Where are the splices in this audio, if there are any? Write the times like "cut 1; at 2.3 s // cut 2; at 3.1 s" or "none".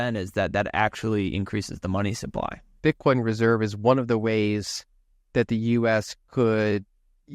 cut 1; at 2.7 s